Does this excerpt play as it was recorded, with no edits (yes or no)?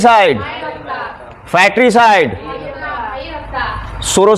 yes